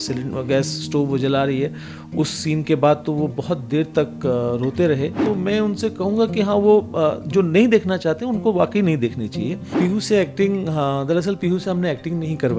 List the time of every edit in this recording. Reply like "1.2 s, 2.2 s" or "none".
5.2 s, 9.7 s